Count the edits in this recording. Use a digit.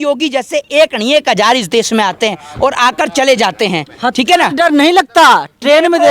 0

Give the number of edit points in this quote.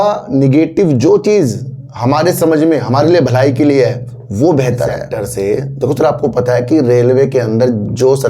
1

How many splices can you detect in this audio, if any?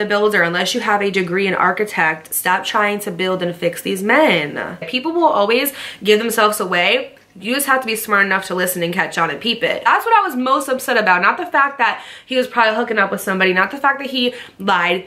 2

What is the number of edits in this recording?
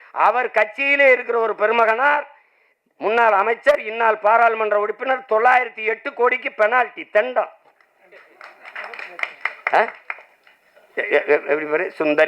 0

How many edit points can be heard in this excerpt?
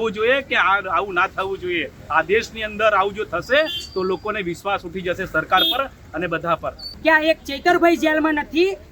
1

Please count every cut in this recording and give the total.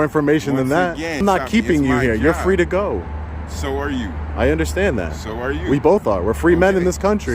1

